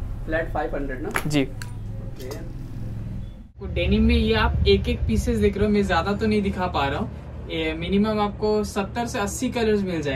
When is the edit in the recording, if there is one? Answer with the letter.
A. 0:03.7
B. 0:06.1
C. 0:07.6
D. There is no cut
A